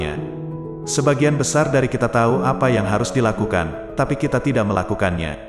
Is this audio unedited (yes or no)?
yes